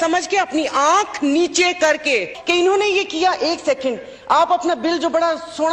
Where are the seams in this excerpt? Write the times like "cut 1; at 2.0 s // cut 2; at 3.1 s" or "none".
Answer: cut 1; at 2.3 s